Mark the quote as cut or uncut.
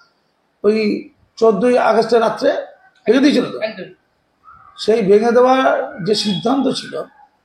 uncut